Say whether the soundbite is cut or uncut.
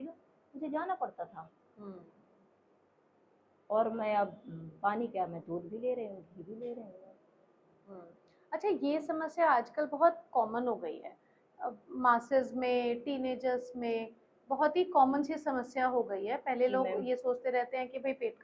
uncut